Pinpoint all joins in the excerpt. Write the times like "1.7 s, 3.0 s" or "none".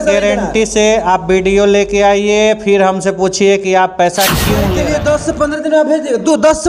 4.7 s